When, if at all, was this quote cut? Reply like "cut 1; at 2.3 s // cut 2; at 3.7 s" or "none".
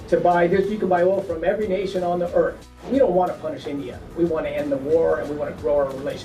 cut 1; at 2.8 s